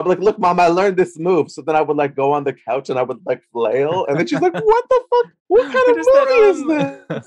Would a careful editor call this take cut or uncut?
cut